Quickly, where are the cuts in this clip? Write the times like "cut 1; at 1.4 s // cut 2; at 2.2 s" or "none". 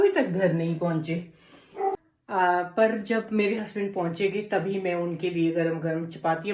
cut 1; at 2.1 s